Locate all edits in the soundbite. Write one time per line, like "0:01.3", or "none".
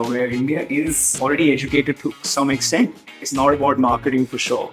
0:01.2
0:03.2